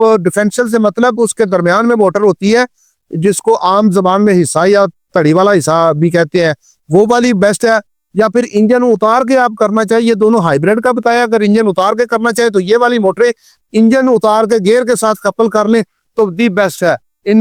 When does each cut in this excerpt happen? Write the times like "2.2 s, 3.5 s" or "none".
none